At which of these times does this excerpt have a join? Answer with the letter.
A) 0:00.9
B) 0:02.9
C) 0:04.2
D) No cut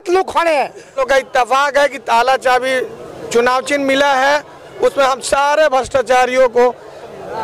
A